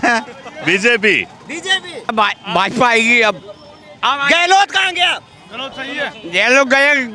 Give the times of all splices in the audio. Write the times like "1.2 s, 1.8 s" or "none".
2.1 s